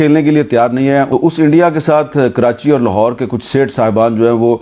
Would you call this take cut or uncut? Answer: cut